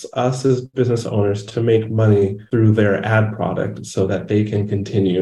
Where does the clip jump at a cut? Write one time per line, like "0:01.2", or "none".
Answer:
0:02.4